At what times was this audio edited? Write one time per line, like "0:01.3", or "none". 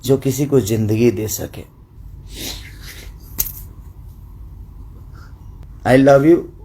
0:02.0
0:05.6